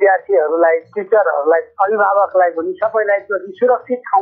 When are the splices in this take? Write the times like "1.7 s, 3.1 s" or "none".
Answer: 1.7 s